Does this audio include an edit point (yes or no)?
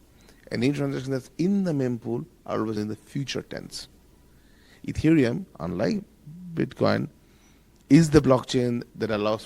yes